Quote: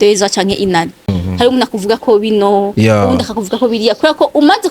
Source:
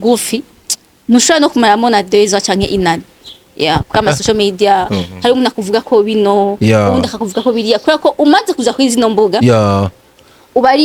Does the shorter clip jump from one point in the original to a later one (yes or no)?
yes